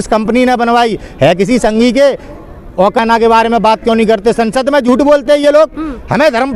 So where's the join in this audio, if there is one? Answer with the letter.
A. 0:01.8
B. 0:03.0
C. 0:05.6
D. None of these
B